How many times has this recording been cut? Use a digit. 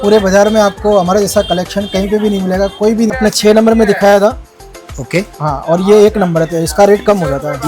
1